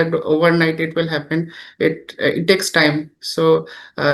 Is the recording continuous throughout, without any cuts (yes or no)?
yes